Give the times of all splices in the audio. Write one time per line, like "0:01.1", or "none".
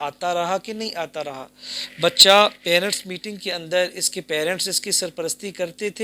none

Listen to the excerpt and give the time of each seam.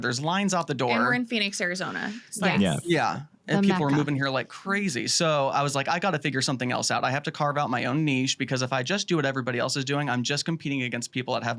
none

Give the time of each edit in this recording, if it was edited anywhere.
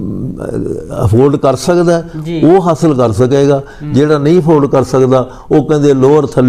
none

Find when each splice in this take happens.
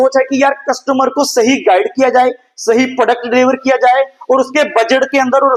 none

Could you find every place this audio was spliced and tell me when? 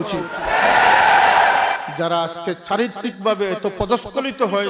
0:01.9

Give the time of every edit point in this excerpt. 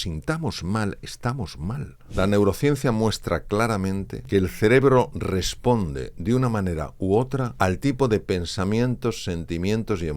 0:01.9
0:04.1
0:07.5

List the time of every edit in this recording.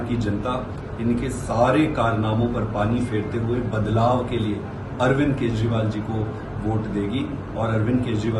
none

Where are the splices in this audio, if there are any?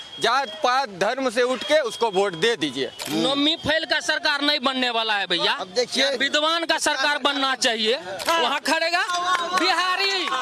0:03.0
0:08.1

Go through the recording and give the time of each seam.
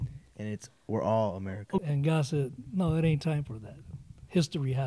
0:01.8

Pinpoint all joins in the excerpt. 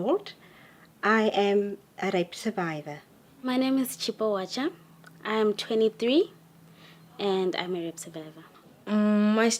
none

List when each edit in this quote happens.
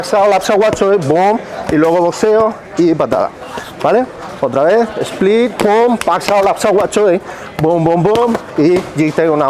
none

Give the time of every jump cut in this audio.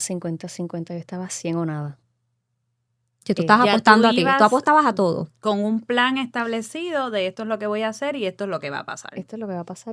none

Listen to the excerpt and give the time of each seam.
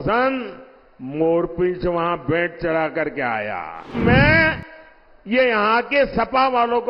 0:03.9

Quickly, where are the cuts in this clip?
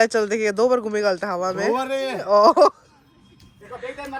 none

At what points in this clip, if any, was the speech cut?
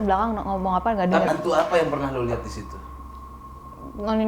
0:01.3

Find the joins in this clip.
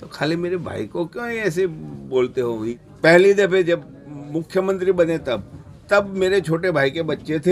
0:02.8

